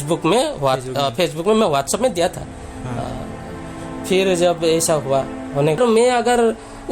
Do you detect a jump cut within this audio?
yes; 1 cut; at 5.8 s

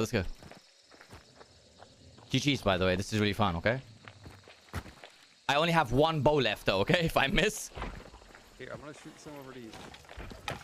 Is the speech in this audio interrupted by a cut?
no; 0 cuts

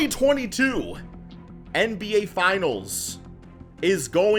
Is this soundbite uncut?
yes; 0 cuts

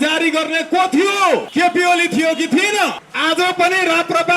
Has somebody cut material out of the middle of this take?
yes; 2 cuts; at 1.5 s, 3.1 s

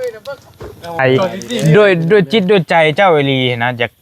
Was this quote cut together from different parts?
yes; 1 cut; at 1.0 s

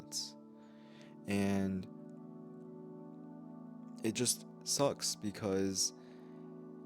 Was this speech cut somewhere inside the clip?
no; 0 cuts

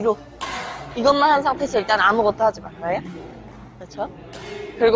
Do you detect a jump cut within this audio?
no; 0 cuts

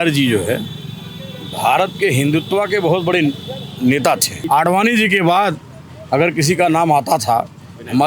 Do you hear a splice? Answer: yes; 1 cut; at 4.3 s

